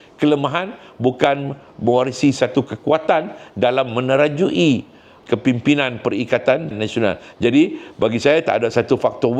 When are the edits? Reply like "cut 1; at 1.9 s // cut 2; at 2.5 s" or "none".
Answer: none